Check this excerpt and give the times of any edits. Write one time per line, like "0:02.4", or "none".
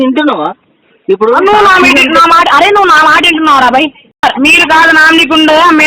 0:04.2